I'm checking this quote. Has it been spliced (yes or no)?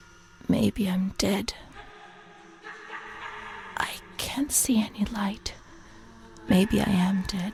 no